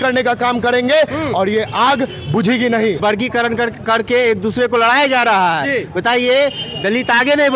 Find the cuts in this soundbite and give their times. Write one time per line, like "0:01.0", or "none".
0:03.0

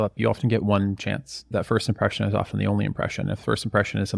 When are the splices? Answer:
0:01.4

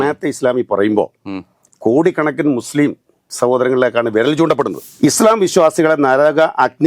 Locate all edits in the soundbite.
0:04.8

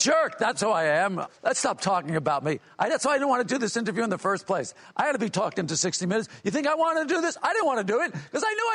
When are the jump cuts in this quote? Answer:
0:01.2

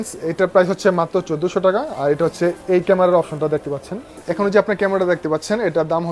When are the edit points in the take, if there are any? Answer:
0:04.1

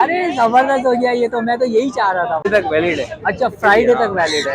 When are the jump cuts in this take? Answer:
0:02.5

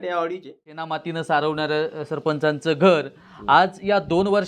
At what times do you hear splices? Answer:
0:00.9

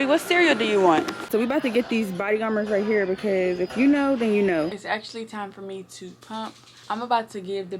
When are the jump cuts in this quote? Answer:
0:01.2
0:04.8
0:06.7

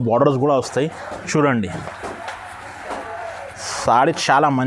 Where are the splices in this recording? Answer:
none

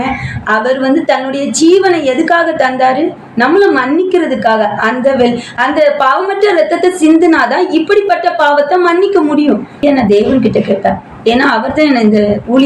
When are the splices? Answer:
0:09.8

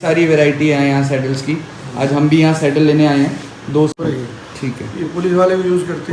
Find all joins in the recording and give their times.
0:03.9

